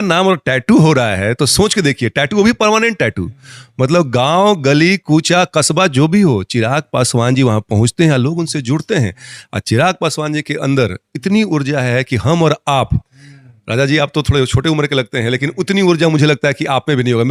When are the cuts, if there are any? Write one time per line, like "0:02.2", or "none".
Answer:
none